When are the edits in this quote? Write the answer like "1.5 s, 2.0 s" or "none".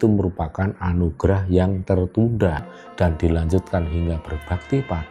2.8 s